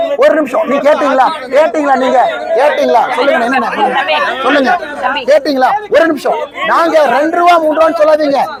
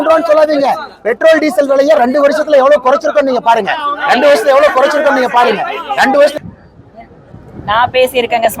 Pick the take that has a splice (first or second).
second